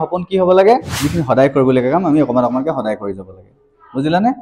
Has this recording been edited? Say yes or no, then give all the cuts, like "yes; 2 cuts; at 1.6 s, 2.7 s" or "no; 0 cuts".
yes; 1 cut; at 0.9 s